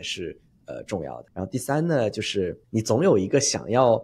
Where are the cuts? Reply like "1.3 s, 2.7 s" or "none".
1.2 s, 2.6 s